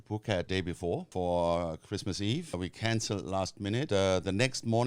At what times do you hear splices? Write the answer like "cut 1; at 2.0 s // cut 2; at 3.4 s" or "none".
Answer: cut 1; at 1.0 s // cut 2; at 2.5 s // cut 3; at 3.9 s